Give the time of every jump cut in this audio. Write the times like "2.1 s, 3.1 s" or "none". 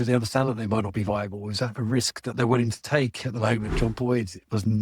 3.7 s